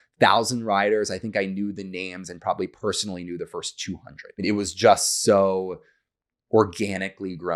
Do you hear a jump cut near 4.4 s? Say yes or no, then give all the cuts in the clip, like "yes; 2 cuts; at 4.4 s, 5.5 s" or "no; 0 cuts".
yes; 1 cut; at 4.4 s